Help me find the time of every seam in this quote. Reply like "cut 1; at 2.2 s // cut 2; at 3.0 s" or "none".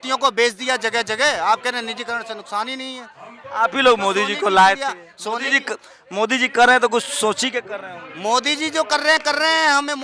none